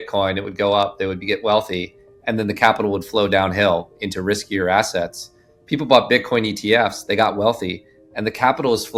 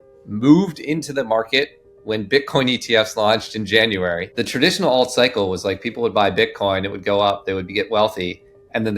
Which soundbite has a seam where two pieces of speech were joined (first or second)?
second